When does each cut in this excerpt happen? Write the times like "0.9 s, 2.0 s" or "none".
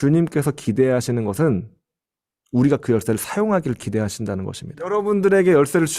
4.9 s